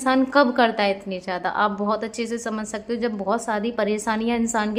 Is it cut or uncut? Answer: uncut